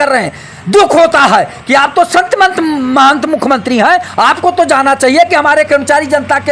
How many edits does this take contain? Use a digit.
0